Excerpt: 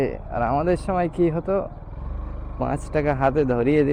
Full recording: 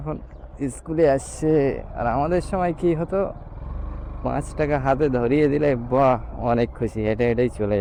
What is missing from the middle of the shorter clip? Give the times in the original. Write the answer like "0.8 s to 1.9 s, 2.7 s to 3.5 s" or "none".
none